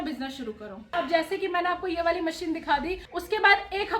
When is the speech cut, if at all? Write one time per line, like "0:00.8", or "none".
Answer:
0:00.9
0:03.1